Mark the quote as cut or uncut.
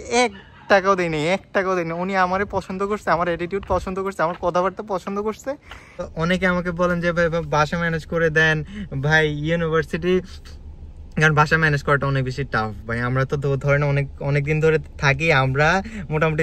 cut